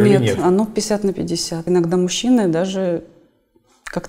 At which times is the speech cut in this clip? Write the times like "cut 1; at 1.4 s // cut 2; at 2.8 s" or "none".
cut 1; at 1.6 s

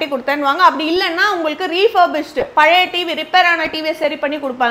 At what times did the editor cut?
none

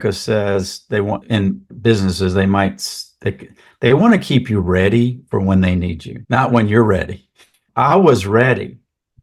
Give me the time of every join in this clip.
none

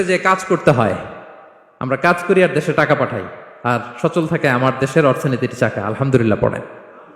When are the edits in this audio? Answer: none

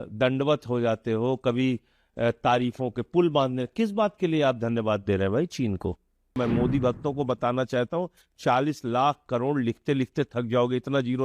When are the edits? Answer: cut 1; at 6.4 s

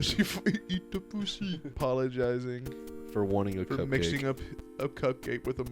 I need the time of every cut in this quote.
cut 1; at 1.8 s

